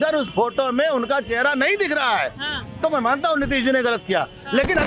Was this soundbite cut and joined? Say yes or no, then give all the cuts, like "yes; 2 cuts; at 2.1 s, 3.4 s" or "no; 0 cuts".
no; 0 cuts